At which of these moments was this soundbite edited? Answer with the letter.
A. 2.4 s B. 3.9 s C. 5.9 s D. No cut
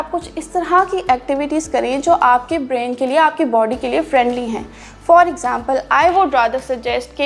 D